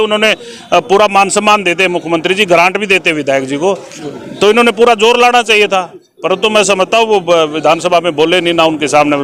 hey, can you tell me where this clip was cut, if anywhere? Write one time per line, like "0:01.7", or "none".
none